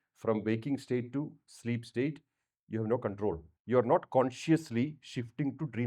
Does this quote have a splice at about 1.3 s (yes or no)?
no